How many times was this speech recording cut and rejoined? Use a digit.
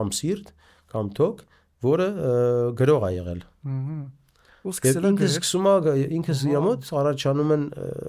0